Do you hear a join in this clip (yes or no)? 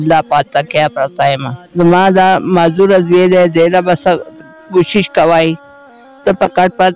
yes